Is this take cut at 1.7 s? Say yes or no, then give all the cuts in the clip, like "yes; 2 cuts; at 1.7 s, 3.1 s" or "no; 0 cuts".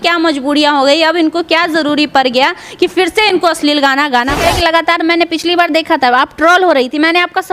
no; 1 cut; at 4.4 s